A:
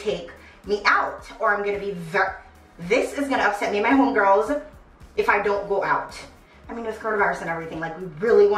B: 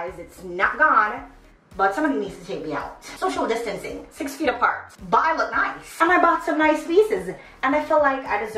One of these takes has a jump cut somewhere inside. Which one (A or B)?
B